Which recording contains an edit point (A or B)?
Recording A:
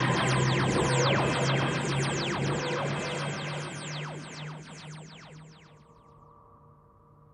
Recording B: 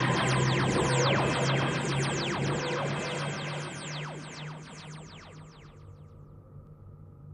B